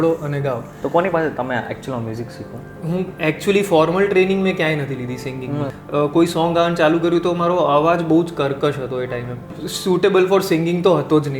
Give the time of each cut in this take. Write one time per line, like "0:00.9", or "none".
0:05.7
0:09.5